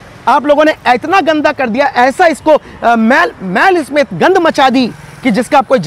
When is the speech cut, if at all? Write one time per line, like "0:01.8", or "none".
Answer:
none